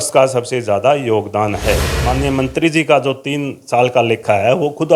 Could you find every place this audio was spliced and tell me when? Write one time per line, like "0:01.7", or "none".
0:02.0